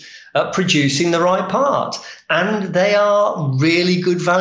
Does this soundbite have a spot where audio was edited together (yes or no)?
no